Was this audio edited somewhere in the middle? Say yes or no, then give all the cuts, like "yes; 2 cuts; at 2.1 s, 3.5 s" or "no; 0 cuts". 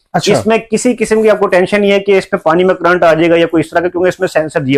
no; 0 cuts